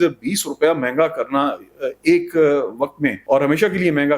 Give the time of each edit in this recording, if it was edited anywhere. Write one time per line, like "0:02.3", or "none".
0:03.2